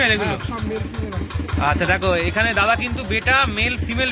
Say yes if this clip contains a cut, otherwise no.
no